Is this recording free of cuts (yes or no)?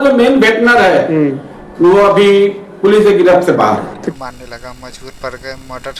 no